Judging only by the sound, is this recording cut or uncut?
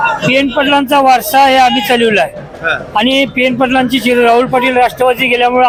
uncut